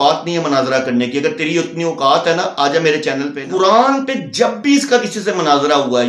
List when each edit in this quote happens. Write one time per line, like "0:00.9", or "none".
0:03.4